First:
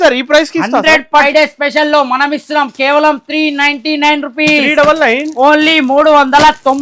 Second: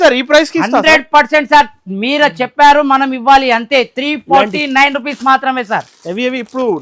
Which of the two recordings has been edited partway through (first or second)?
first